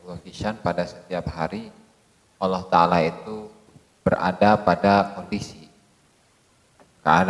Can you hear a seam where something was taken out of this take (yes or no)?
no